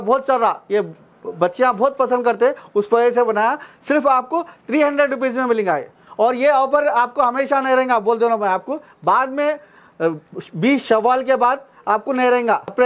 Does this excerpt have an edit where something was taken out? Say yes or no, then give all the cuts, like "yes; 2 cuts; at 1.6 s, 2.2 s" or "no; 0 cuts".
no; 0 cuts